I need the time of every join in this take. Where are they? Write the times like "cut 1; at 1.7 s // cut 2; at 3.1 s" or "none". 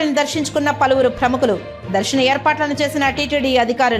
none